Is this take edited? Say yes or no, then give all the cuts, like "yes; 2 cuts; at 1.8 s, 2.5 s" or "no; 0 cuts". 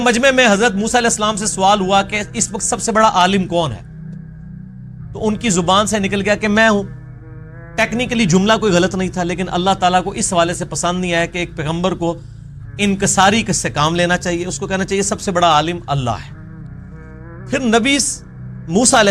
yes; 2 cuts; at 3.9 s, 5.1 s